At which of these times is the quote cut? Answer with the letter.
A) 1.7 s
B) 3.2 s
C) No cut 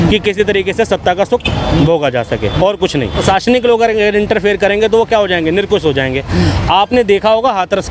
B